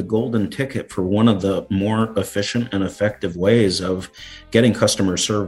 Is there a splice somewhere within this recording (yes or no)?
no